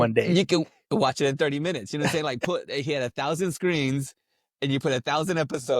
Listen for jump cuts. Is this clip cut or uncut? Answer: uncut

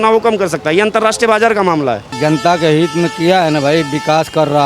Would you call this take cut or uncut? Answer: cut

